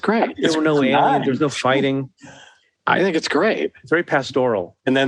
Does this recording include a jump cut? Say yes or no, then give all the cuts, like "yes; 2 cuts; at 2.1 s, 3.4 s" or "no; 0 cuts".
no; 0 cuts